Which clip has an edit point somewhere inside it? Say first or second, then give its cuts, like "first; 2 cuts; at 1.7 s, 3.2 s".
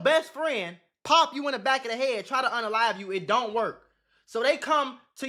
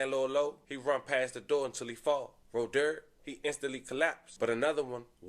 second; 1 cut; at 4.2 s